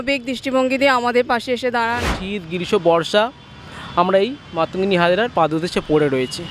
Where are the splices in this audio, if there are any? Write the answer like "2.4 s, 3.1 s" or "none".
2.2 s